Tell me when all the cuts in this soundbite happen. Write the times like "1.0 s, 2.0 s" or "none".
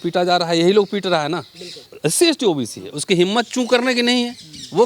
1.9 s